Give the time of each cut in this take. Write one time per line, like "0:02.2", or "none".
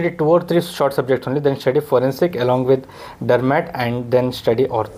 none